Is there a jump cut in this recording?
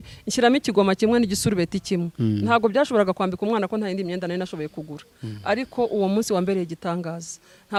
no; 0 cuts

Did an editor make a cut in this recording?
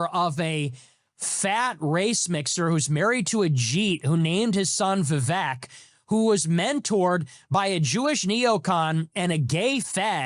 no; 0 cuts

